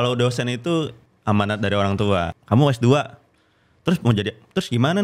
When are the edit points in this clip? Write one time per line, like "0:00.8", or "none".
0:01.0
0:02.3